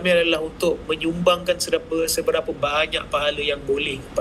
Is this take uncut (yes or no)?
yes